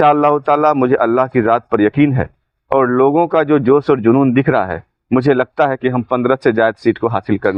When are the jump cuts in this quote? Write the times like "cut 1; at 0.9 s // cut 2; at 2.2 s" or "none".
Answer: none